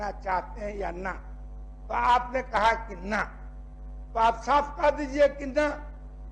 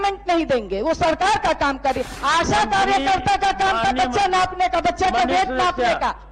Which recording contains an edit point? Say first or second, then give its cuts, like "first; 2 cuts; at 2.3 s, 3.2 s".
second; 1 cut; at 2.1 s